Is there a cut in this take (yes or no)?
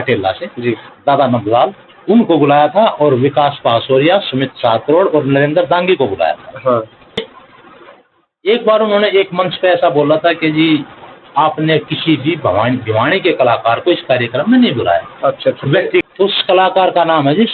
yes